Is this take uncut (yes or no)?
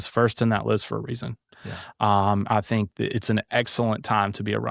yes